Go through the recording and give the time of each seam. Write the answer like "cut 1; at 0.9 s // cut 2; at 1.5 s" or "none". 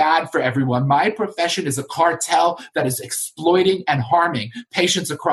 none